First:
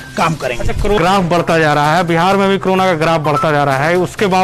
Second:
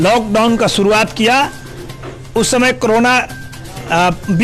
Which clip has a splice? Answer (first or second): first